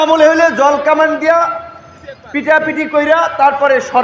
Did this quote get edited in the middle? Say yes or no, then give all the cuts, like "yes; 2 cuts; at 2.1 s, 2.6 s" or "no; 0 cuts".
no; 0 cuts